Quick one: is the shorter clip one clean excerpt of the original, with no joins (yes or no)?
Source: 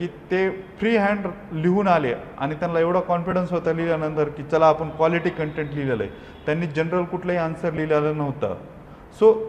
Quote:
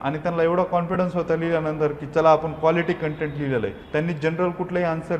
no